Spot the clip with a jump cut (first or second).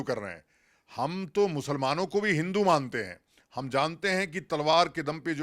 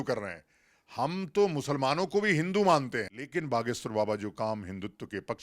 second